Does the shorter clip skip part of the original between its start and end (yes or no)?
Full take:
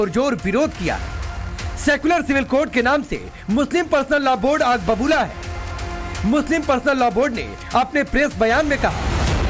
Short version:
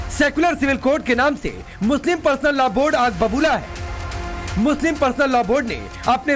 no